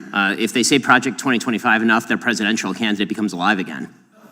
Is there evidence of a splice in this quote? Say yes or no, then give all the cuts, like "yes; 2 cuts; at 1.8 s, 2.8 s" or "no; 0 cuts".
no; 0 cuts